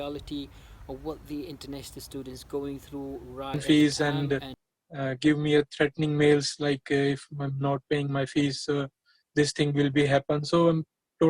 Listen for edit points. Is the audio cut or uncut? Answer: cut